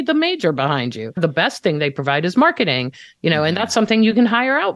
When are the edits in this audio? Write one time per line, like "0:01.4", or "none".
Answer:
0:01.2